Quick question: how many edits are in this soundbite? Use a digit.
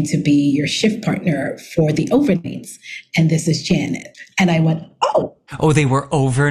1